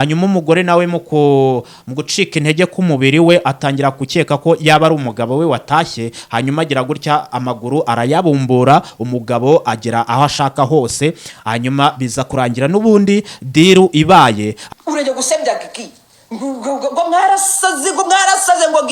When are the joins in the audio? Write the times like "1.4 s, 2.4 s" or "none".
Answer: 14.6 s